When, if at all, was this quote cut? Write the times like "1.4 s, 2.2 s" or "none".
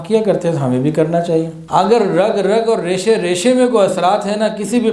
1.6 s